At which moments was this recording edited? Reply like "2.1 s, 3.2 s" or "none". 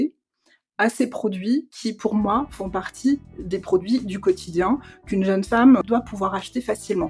5.8 s